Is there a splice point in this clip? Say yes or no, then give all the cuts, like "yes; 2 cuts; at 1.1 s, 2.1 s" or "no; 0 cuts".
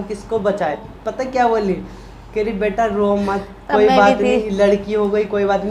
yes; 2 cuts; at 0.8 s, 4.5 s